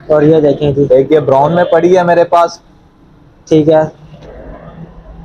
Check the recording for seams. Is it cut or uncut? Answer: uncut